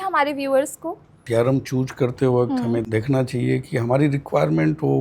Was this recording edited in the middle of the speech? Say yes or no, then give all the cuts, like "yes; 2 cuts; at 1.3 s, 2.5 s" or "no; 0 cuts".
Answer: yes; 2 cuts; at 1.2 s, 2.8 s